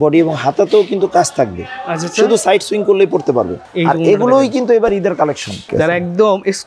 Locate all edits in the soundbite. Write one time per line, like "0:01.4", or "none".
0:03.6
0:05.6